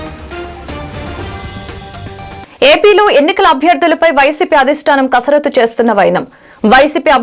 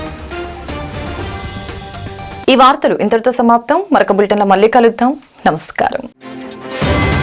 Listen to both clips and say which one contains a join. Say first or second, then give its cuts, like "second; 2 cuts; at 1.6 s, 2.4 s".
first; 1 cut; at 2.4 s